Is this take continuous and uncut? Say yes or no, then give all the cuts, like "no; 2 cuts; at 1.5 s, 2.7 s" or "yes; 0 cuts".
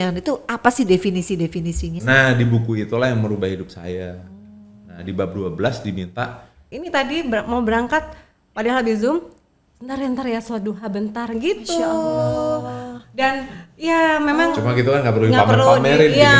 no; 2 cuts; at 2.0 s, 6.7 s